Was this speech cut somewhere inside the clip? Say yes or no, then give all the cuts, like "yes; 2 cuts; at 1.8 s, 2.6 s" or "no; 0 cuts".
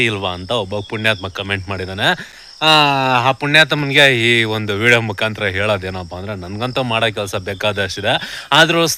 no; 0 cuts